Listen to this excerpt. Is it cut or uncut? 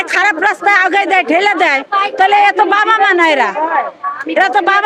uncut